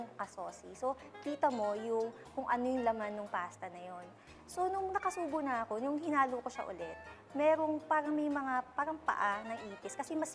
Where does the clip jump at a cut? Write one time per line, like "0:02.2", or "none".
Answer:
0:01.1